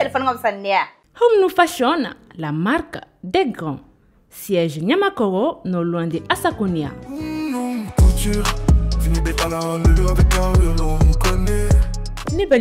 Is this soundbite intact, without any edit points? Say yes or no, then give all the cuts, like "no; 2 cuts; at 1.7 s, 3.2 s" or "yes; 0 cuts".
no; 1 cut; at 1.0 s